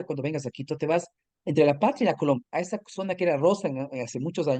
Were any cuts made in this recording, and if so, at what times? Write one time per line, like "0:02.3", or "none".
none